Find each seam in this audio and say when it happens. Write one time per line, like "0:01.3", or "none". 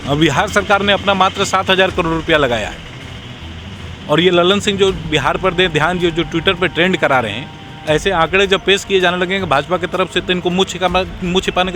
none